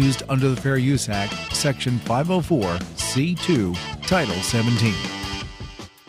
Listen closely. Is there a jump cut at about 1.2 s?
no; 1 cut; at 5.1 s

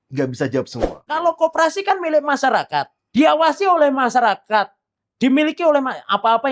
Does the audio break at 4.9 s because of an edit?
no; 2 cuts; at 1.0 s, 3.0 s

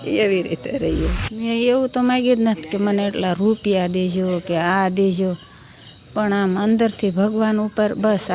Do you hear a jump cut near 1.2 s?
yes; 1 cut; at 1.2 s

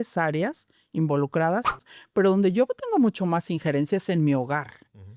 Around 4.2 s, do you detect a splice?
no; 1 cut; at 1.9 s

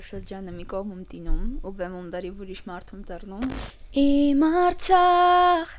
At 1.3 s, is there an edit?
no; 1 cut; at 3.6 s

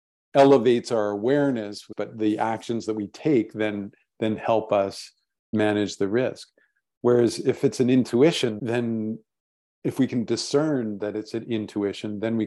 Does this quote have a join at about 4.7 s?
no; 2 cuts; at 1.9 s, 8.6 s

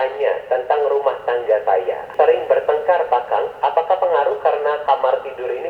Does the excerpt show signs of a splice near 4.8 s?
yes; 2 cuts; at 2.0 s, 4.8 s

